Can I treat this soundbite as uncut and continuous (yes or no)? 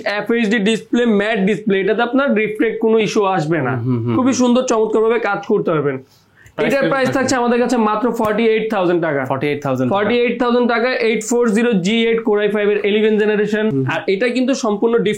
no